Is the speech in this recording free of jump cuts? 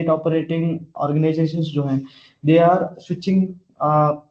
yes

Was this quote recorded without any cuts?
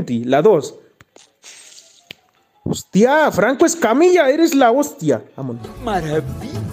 no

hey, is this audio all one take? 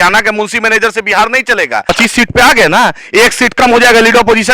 no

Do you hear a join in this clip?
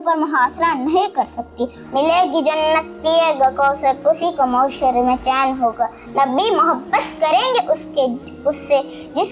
yes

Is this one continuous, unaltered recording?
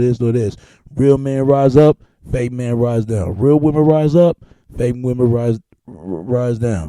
yes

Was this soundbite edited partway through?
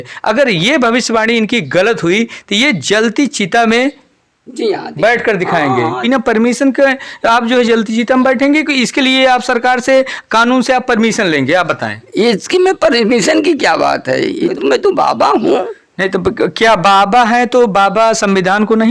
yes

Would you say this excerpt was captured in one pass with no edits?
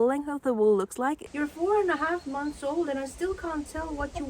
no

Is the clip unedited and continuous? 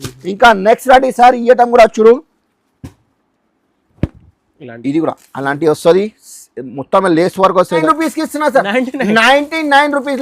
no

